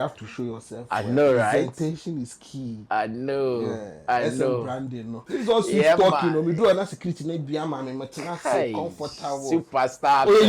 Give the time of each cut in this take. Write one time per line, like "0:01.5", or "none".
0:05.2